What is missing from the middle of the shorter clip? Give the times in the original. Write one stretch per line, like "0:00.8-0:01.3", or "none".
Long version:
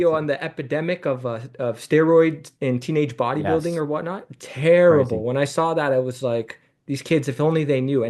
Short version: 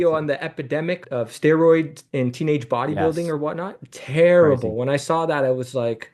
0:01.0-0:01.5